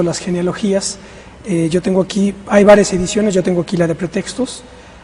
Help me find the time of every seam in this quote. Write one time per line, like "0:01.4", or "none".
0:03.3